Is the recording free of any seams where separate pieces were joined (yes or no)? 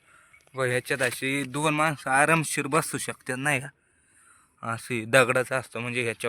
yes